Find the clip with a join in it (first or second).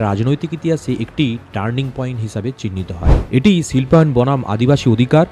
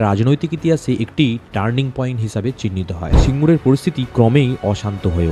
second